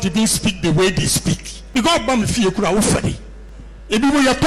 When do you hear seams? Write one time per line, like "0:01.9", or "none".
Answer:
0:01.5